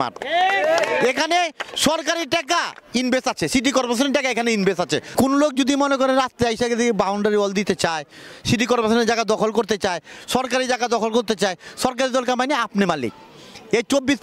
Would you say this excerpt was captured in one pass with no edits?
no; 1 cut; at 5.1 s

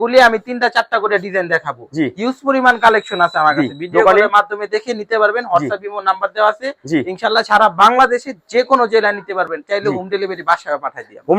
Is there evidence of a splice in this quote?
no; 0 cuts

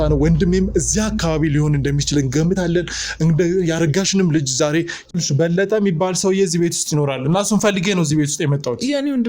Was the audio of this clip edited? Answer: yes; 1 cut; at 5.1 s

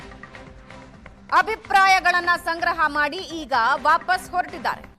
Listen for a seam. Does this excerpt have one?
yes; 1 cut; at 1.2 s

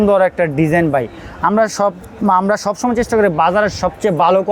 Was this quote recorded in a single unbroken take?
yes; 0 cuts

